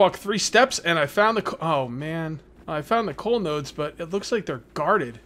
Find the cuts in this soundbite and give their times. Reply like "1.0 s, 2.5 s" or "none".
2.5 s